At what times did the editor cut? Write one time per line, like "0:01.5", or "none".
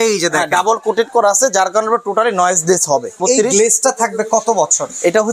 0:03.2